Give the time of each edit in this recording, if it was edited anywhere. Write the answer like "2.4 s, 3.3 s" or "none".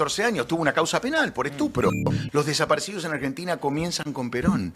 2.1 s

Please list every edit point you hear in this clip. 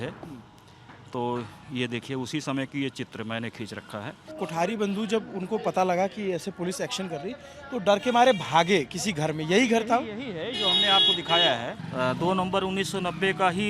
4.3 s, 11.8 s

